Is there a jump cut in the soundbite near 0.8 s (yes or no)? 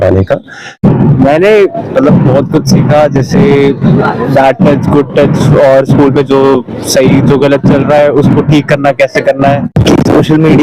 yes